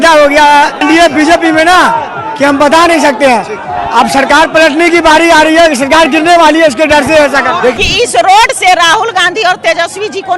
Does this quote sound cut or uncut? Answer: cut